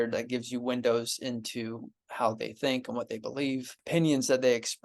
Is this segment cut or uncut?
cut